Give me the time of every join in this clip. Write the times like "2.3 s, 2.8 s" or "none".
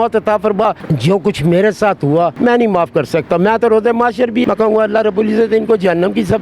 0.8 s, 2.3 s, 4.4 s